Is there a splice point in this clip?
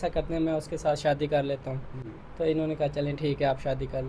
no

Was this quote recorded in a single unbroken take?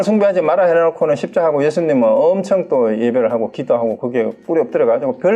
yes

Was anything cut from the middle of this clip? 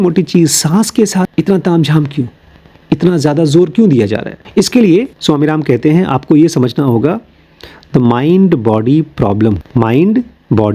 yes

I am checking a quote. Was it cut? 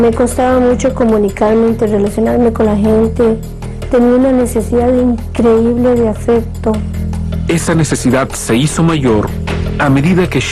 no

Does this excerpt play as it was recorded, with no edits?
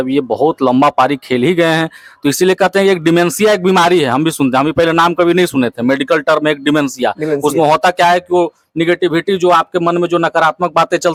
yes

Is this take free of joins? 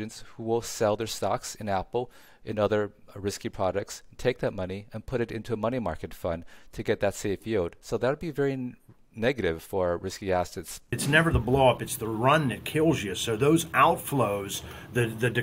no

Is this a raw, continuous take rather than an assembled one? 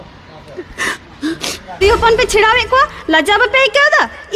no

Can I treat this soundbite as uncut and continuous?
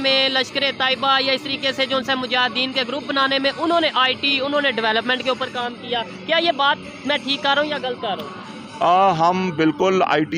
yes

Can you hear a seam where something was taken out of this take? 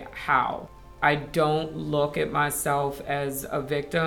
yes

